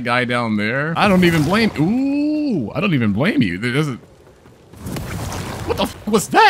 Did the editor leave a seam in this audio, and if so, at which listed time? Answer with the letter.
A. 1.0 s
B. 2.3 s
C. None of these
A